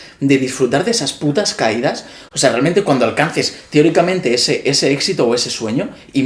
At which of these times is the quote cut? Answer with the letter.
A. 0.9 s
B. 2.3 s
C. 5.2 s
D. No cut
D